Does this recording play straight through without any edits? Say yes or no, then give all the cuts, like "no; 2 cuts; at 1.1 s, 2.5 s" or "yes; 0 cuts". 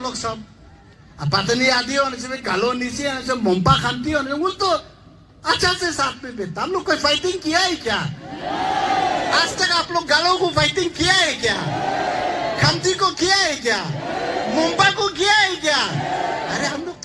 yes; 0 cuts